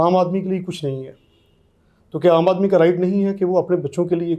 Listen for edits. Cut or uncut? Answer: uncut